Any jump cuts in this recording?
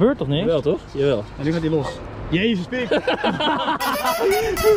no; 0 cuts

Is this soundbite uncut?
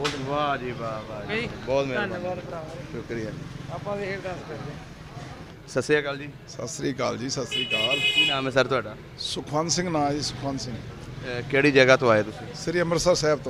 yes; 0 cuts

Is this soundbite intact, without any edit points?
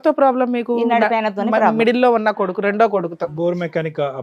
yes; 0 cuts

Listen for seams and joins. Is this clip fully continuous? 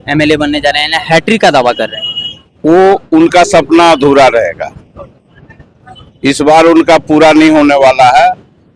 yes; 0 cuts

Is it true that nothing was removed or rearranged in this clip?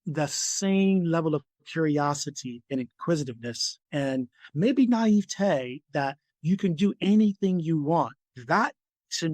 no; 1 cut; at 8.3 s

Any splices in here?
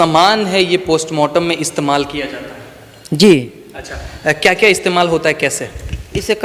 no; 0 cuts

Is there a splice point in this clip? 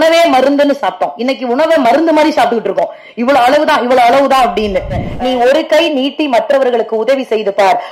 yes; 1 cut; at 5.1 s

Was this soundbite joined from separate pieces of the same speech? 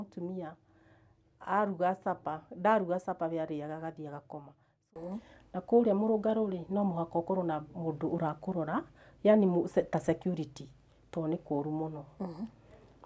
yes; 1 cut; at 4.8 s

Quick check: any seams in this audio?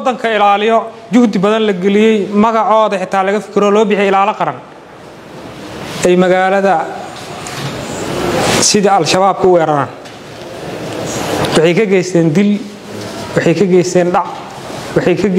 no; 0 cuts

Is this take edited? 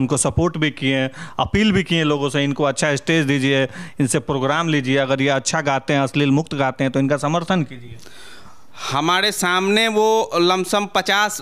no; 0 cuts

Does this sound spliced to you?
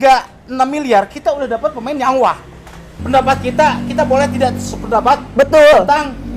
yes; 1 cut; at 2.9 s

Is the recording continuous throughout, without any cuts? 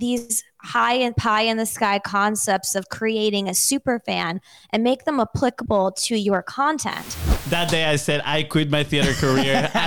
no; 1 cut; at 7.3 s

